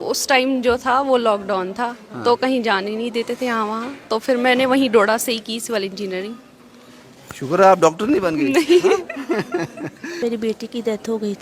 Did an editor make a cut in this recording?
yes; 1 cut; at 10.2 s

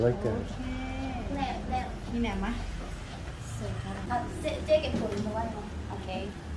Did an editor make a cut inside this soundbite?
no; 0 cuts

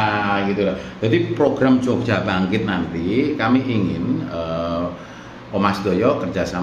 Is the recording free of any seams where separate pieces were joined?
yes; 0 cuts

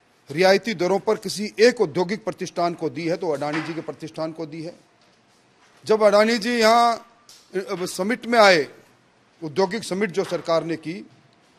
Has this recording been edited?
no; 0 cuts

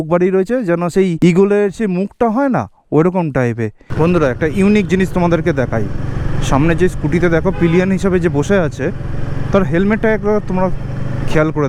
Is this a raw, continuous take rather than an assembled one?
no; 2 cuts; at 1.1 s, 3.8 s

